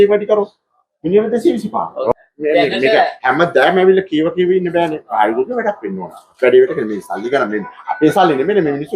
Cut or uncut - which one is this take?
cut